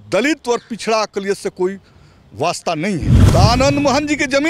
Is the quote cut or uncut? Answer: cut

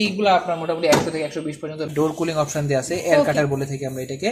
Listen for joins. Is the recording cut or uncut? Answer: cut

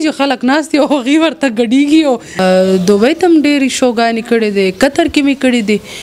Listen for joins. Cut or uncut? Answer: cut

